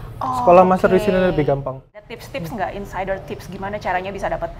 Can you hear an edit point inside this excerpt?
yes; 1 cut; at 2.1 s

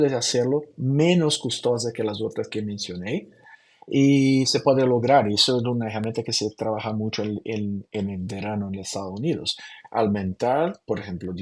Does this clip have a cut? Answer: no; 0 cuts

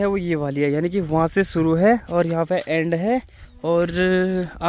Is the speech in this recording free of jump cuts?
yes; 0 cuts

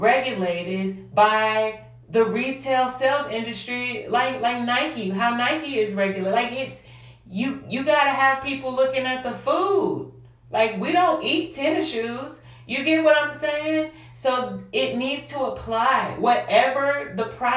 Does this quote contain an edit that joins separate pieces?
no; 0 cuts

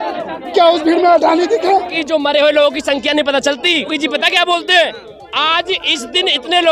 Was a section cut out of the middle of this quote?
yes; 2 cuts; at 2.0 s, 3.9 s

